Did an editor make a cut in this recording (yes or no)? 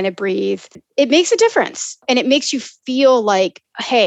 yes